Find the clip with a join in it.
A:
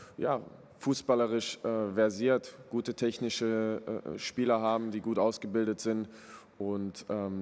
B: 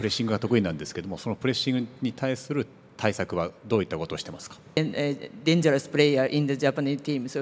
B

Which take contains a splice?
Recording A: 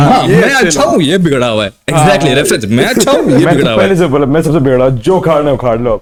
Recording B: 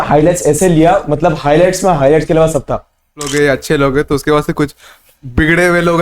B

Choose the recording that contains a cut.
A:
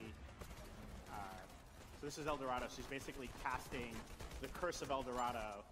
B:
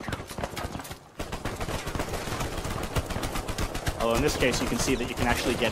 B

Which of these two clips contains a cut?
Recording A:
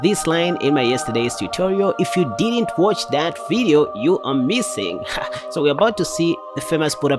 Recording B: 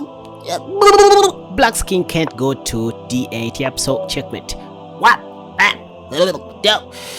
B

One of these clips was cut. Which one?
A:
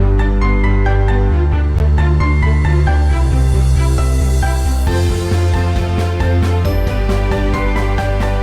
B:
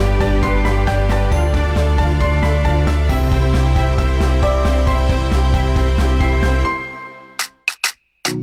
A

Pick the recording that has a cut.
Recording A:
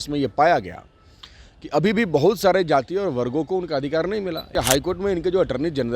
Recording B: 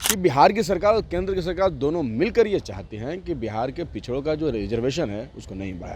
A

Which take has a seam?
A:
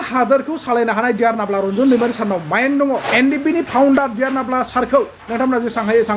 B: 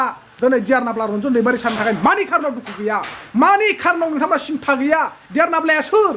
A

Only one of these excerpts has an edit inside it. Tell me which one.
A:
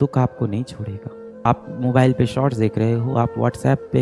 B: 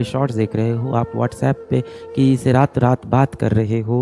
A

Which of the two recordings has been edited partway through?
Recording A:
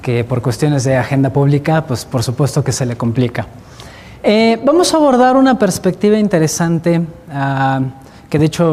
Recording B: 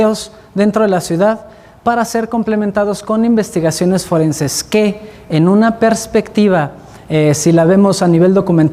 B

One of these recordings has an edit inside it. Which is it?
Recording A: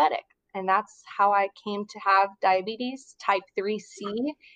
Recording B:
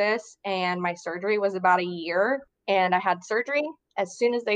B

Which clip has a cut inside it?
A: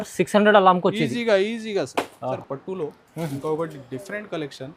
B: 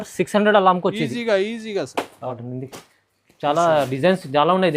B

